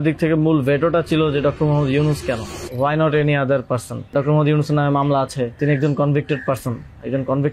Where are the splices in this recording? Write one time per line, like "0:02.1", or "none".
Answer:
0:02.6
0:04.1
0:05.6